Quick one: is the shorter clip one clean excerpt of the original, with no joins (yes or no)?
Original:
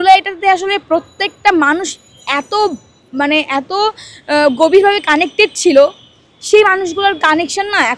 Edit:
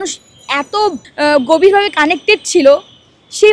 no